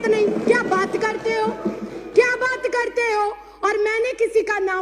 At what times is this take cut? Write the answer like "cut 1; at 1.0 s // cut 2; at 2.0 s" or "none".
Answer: none